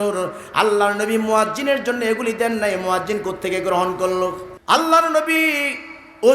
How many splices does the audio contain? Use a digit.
1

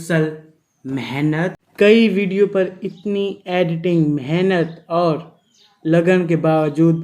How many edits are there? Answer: 1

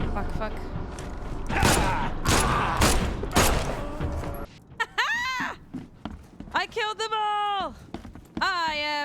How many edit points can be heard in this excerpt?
2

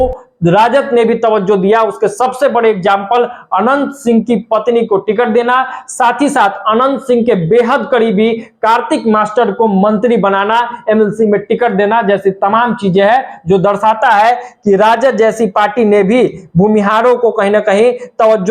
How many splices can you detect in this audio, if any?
0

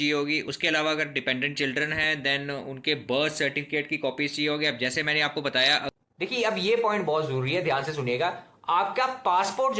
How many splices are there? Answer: 1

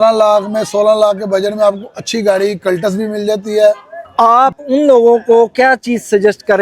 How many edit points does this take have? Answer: 1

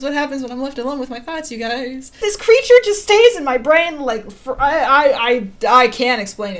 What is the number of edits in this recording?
1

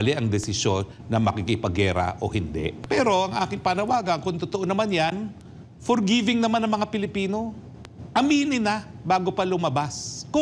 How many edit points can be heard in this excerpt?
2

